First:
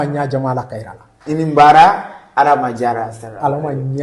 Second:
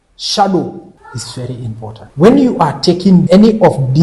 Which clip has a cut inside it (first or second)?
second